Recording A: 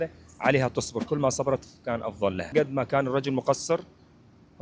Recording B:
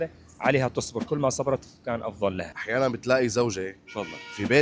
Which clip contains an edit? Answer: A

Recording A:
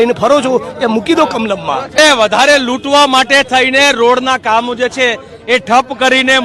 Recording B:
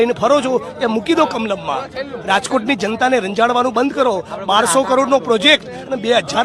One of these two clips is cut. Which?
A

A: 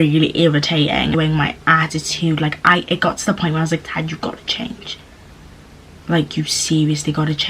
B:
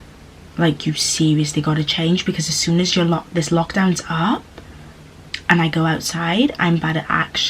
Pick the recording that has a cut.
A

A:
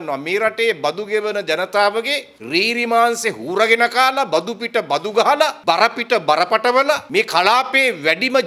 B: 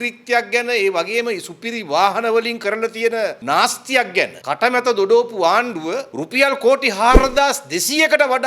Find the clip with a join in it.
B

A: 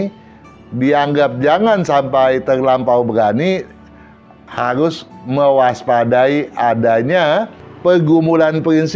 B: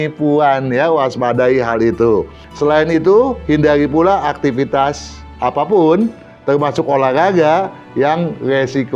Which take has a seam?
B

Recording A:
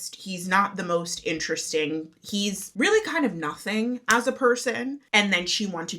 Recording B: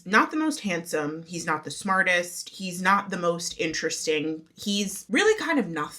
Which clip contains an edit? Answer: A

